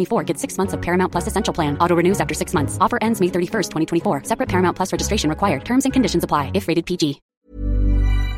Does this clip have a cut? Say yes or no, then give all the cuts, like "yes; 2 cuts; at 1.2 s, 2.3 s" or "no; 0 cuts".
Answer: yes; 1 cut; at 7.3 s